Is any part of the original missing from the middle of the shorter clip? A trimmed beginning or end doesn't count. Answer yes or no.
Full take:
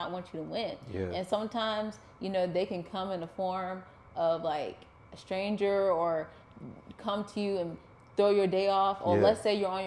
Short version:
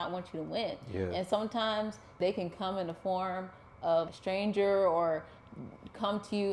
yes